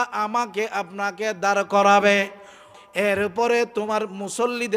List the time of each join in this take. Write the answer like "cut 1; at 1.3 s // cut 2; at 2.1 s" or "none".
cut 1; at 2.6 s